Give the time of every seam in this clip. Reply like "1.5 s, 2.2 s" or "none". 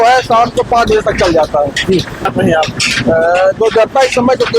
2.3 s

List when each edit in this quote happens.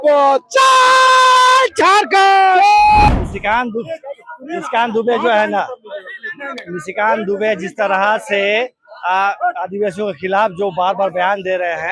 3.1 s

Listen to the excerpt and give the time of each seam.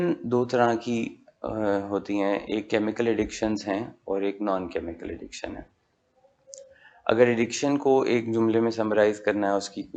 none

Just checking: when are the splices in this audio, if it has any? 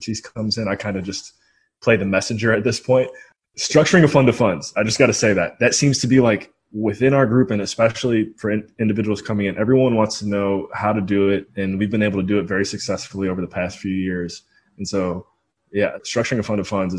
3.2 s

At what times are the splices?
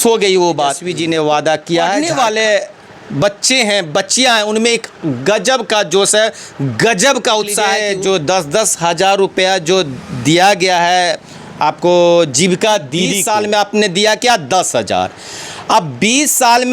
0.9 s, 2.0 s, 7.8 s, 13.3 s

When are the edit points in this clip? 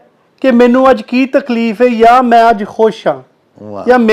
none

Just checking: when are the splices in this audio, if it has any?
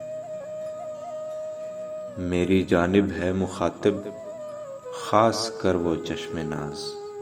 1.1 s

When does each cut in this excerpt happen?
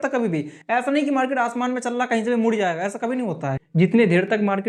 3.6 s

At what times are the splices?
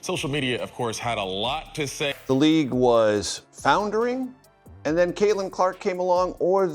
2.2 s

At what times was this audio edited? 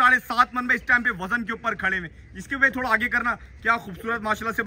none

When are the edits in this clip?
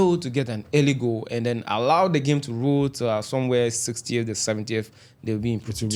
none

